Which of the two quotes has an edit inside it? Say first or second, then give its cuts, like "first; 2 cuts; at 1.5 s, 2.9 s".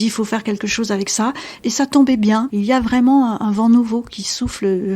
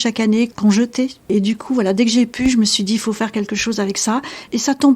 second; 1 cut; at 1.3 s